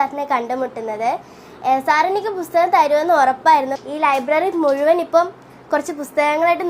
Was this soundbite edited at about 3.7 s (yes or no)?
yes